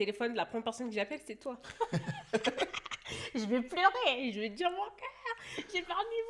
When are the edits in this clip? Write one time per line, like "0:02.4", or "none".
none